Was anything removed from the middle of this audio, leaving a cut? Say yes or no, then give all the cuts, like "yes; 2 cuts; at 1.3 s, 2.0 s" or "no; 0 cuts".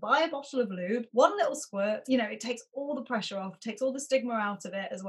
yes; 2 cuts; at 1.1 s, 2.0 s